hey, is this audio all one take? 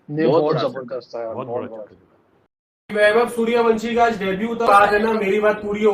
no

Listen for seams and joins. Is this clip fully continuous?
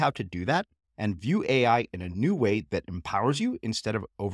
yes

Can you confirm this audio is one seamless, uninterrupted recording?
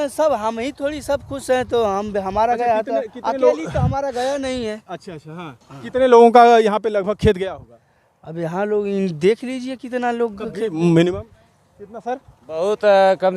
yes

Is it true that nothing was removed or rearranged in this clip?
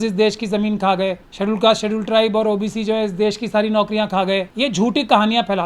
no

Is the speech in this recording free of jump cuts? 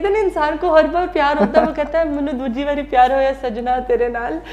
yes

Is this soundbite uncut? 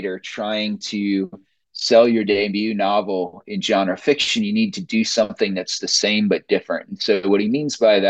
yes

